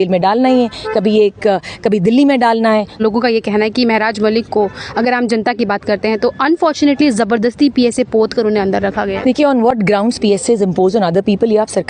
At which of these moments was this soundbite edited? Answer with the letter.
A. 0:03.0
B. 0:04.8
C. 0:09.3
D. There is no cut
A